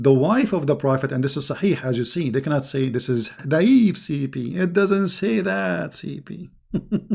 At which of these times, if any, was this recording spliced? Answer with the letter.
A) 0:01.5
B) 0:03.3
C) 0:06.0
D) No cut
B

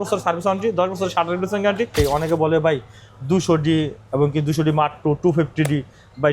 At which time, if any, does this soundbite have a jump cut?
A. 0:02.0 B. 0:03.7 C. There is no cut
A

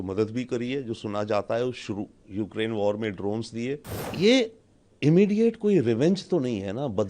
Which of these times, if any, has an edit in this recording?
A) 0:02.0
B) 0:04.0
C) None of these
B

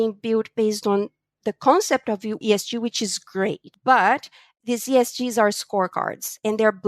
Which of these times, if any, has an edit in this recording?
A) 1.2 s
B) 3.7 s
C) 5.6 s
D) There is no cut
B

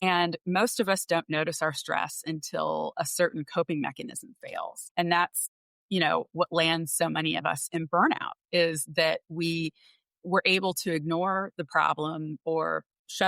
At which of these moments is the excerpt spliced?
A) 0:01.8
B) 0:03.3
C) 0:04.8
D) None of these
C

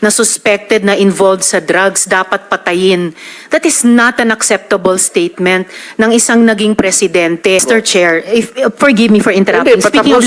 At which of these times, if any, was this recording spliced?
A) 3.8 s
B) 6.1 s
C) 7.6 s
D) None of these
C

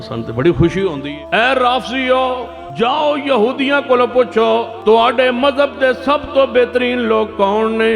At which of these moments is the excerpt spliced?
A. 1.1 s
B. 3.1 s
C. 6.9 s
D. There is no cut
A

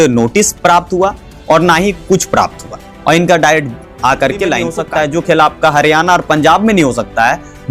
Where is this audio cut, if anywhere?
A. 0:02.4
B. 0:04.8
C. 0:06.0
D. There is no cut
B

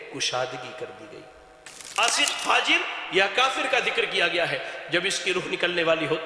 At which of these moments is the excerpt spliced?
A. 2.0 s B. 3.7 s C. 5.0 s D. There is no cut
A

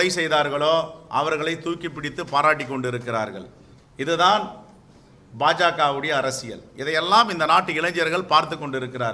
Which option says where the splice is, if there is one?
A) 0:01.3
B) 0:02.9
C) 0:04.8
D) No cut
D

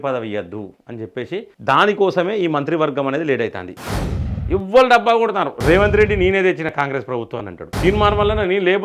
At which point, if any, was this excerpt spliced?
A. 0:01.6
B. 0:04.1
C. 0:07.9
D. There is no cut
B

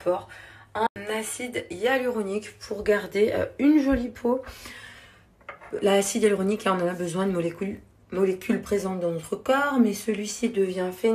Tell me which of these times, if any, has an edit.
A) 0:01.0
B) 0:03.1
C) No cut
A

